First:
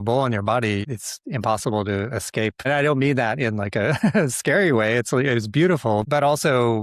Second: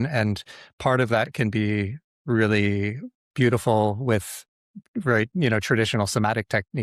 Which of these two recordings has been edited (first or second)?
first